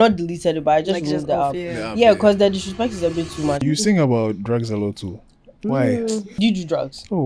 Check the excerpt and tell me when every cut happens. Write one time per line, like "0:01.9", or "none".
0:03.6
0:06.3